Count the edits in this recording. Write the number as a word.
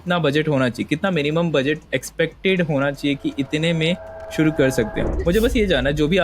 one